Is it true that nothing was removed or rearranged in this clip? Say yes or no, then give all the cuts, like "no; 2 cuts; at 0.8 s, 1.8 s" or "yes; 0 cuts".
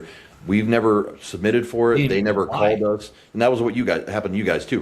yes; 0 cuts